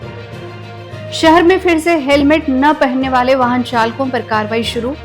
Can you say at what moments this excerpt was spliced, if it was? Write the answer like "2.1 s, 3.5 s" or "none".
1.2 s